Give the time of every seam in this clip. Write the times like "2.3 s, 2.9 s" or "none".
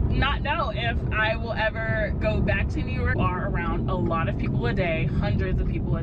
3.1 s